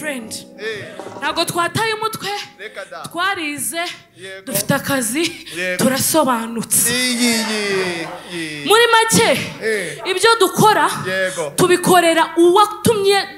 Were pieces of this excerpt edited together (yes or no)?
no